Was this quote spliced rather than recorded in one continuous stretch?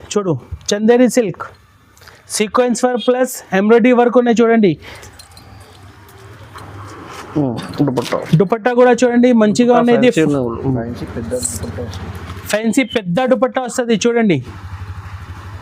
no; 0 cuts

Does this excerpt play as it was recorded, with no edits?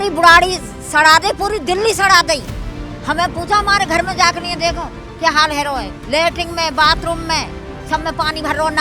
yes; 0 cuts

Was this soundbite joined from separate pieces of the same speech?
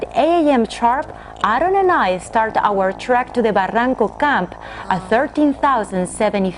no; 0 cuts

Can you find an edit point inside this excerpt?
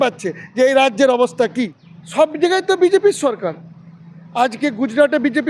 yes; 1 cut; at 1.5 s

